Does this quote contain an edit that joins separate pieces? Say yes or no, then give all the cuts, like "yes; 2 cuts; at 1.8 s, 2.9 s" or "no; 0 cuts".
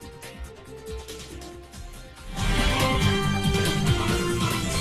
no; 0 cuts